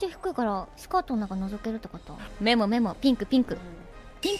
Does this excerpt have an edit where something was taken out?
yes; 1 cut; at 2.2 s

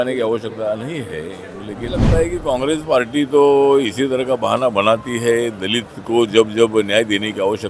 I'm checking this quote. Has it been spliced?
yes; 1 cut; at 1.9 s

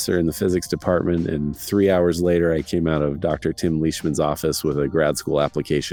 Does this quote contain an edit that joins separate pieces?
no; 0 cuts

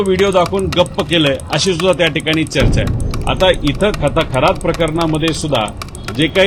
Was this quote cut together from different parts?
no; 0 cuts

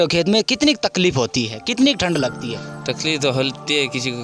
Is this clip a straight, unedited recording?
yes; 0 cuts

